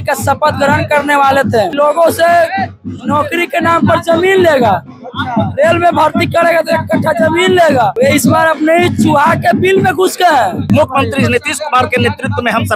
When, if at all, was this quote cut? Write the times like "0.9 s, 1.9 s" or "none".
1.7 s, 7.9 s, 10.6 s